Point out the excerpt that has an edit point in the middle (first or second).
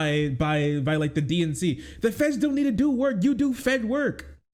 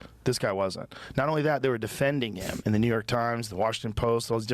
second